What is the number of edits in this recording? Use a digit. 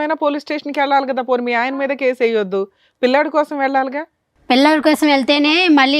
0